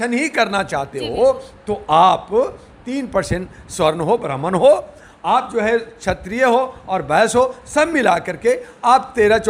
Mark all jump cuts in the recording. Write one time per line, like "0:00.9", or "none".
none